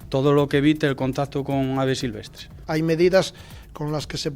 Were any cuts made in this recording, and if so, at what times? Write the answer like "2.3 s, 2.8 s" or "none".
2.6 s